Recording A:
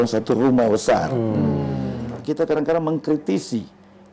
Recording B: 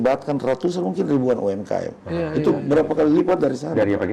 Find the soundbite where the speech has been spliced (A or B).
A